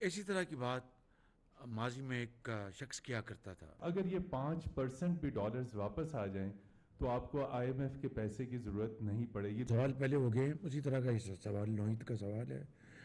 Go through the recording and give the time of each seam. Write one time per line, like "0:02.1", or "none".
0:03.7
0:09.7